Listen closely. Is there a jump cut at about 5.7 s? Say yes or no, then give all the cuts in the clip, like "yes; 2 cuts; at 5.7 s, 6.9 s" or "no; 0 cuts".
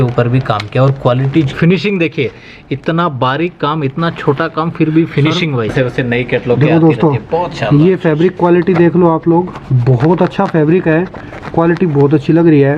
yes; 2 cuts; at 1.5 s, 5.7 s